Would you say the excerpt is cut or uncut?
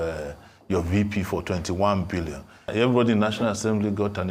uncut